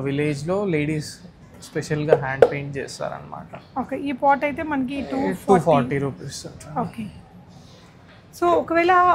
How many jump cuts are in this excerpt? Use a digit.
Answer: 0